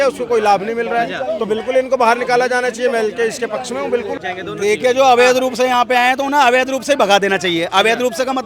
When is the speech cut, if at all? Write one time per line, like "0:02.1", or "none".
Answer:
0:04.2